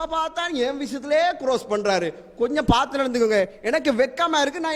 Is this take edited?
no; 0 cuts

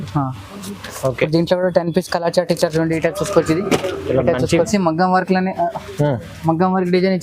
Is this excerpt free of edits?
no; 1 cut; at 4.7 s

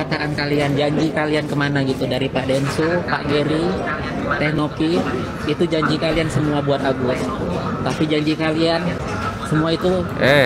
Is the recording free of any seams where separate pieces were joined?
yes; 0 cuts

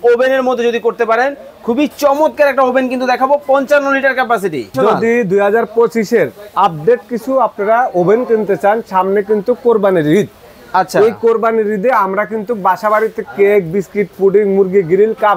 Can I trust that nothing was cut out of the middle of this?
no; 1 cut; at 4.7 s

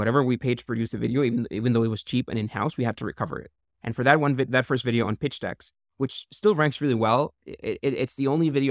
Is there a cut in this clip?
no; 0 cuts

